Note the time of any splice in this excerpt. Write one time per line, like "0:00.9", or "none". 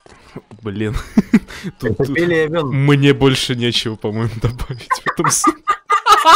none